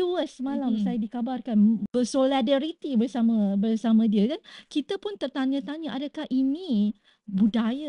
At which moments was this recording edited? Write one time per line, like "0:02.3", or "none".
0:01.9